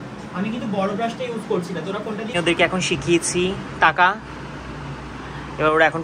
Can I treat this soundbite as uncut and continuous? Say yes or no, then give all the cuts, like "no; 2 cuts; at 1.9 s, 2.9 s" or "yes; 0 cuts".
no; 1 cut; at 2.3 s